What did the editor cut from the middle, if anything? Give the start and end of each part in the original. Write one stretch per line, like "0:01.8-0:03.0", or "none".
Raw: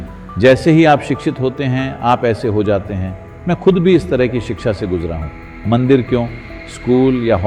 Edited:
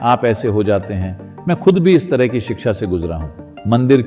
none